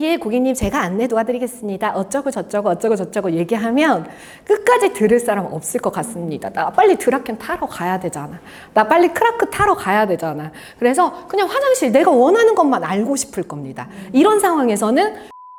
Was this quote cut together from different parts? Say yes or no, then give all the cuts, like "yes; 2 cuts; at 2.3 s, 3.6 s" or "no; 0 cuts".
no; 0 cuts